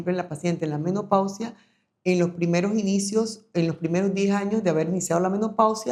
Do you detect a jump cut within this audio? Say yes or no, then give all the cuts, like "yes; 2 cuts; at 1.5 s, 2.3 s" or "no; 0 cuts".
no; 0 cuts